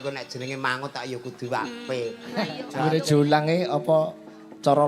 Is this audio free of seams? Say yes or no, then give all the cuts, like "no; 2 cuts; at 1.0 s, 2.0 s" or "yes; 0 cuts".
no; 1 cut; at 2.6 s